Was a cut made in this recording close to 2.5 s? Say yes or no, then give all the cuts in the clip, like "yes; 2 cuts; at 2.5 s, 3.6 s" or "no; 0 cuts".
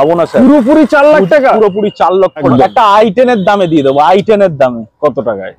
yes; 1 cut; at 2.5 s